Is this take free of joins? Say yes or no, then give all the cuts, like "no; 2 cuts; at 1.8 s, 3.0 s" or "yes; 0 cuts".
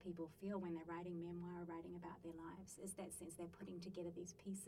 yes; 0 cuts